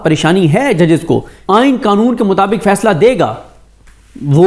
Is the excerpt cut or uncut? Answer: cut